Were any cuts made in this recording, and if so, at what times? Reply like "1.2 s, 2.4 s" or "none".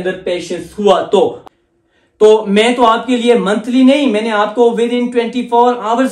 1.4 s